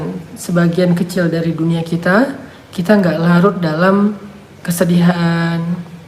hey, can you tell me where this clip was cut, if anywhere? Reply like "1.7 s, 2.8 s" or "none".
4.6 s

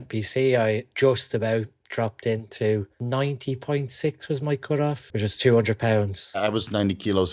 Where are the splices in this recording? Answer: 0.9 s, 3.4 s, 5.4 s, 6.4 s

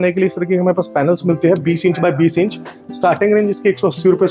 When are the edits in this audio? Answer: none

